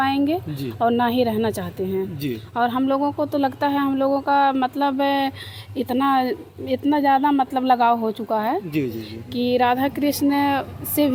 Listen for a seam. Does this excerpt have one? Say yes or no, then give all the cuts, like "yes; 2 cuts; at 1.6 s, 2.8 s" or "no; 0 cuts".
no; 0 cuts